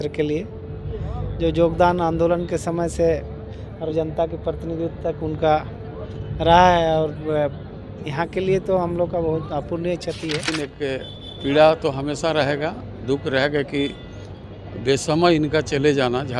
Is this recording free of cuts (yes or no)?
no